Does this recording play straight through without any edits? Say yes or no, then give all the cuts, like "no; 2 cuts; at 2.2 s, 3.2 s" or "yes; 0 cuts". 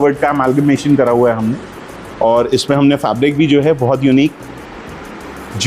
yes; 0 cuts